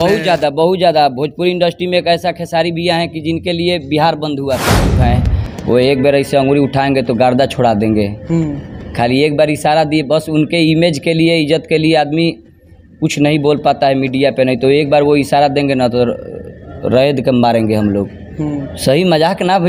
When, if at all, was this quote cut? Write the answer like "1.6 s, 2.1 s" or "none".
5.0 s